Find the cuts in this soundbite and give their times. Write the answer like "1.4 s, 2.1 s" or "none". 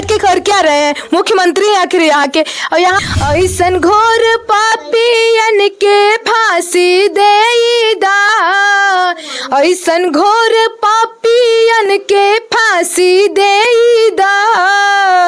3.0 s